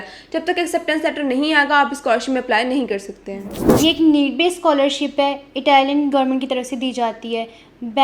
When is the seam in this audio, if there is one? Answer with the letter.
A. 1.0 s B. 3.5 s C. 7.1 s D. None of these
B